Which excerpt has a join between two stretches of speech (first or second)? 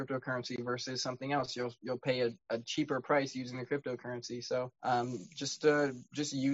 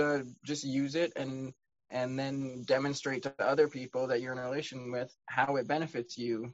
first